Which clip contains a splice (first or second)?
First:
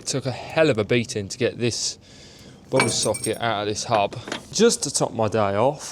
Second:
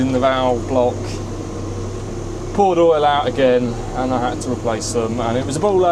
first